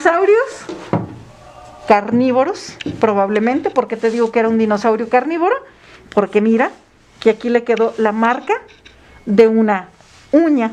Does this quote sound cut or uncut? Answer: uncut